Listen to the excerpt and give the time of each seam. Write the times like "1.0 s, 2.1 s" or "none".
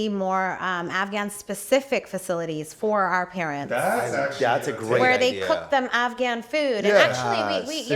none